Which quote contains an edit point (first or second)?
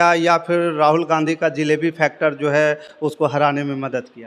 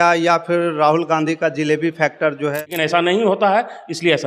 second